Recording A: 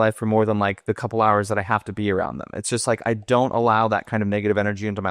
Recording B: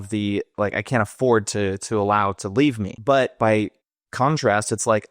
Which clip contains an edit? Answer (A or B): B